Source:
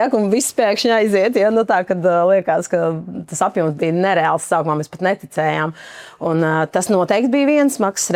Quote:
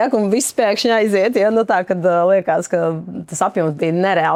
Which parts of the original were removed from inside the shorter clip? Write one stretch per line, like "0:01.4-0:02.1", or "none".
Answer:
none

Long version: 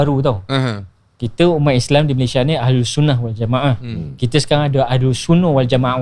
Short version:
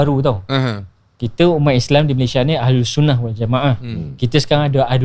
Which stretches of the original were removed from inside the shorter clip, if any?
none

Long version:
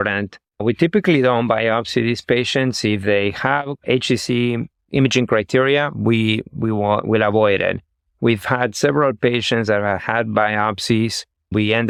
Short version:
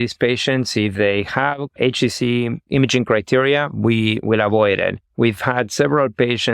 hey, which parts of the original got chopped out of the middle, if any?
0:04.7-0:04.8
0:06.4-0:07.0
0:07.8-0:08.1

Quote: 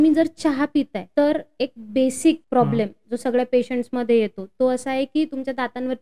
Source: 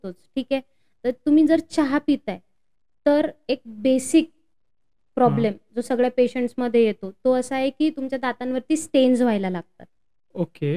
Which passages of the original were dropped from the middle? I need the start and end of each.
0:02.3-0:02.9
0:04.3-0:05.1

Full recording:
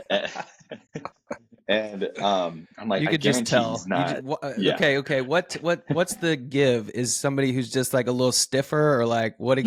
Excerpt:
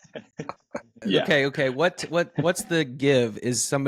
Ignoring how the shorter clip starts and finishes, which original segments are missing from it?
0:01.5-0:04.5

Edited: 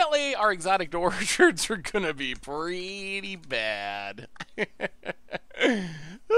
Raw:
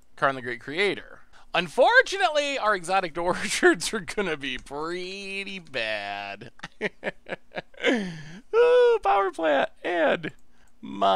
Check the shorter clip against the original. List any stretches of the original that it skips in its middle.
none

